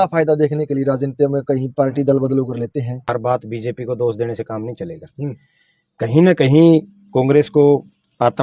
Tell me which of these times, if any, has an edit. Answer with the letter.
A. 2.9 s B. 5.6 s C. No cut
A